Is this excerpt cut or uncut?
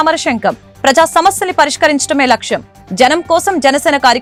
uncut